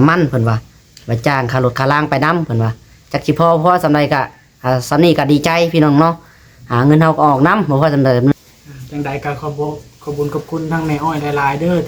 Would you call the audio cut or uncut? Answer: cut